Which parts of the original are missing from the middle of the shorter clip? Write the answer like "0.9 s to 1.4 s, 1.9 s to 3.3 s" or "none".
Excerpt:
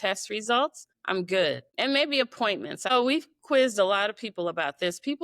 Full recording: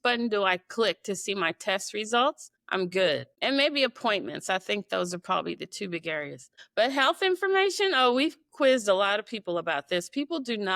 4.5 s to 8.0 s